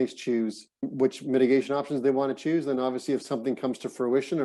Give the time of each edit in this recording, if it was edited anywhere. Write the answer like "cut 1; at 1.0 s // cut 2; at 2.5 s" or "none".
none